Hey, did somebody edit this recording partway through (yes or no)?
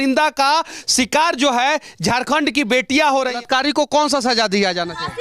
yes